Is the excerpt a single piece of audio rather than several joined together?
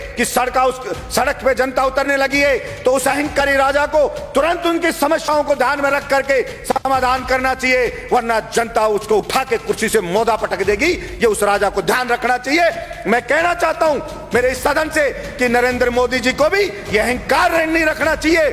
yes; 0 cuts

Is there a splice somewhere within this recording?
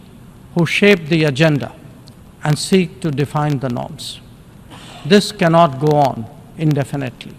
no; 0 cuts

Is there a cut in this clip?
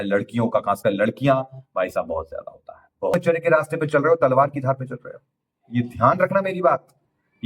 yes; 1 cut; at 3.1 s

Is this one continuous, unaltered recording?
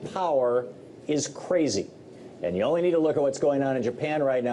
yes; 0 cuts

